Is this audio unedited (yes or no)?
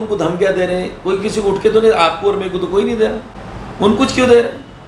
yes